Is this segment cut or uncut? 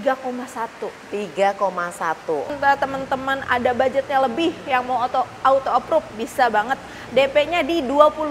cut